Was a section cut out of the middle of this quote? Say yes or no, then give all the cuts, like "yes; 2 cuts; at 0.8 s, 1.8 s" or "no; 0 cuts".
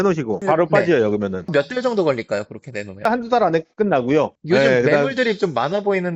yes; 2 cuts; at 1.5 s, 3.1 s